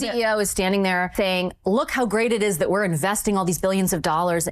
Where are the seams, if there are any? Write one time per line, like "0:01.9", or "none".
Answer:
0:01.1